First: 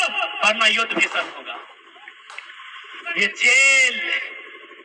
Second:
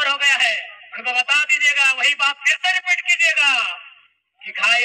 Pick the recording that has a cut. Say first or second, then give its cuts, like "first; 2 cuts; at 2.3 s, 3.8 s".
first; 1 cut; at 2.9 s